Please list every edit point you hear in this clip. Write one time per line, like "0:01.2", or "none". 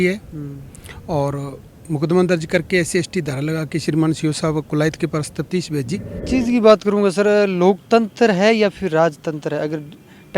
0:06.3